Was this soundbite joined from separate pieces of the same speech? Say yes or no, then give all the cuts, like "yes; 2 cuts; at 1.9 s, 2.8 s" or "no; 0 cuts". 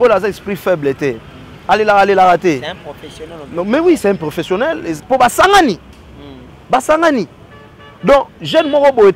yes; 1 cut; at 4.9 s